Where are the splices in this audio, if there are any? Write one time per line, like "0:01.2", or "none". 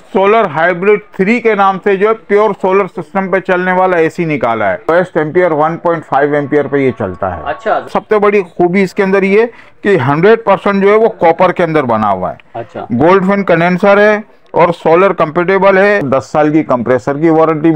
0:04.9
0:07.8
0:16.0